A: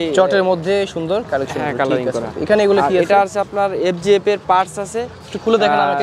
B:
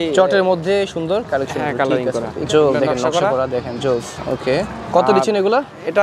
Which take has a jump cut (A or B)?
B